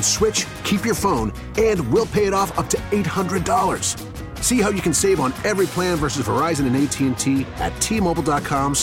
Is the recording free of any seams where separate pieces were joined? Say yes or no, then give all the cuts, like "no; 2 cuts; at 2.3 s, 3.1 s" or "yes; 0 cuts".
yes; 0 cuts